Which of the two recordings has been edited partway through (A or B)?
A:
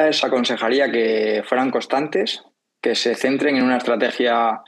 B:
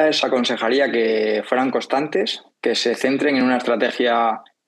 B